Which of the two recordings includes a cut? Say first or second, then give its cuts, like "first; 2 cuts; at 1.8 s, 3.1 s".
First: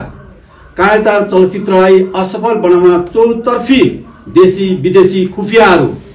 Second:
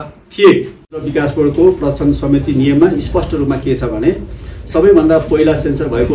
second; 1 cut; at 1.1 s